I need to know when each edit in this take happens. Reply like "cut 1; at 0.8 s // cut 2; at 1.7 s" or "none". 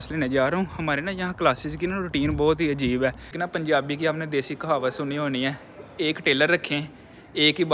cut 1; at 3.3 s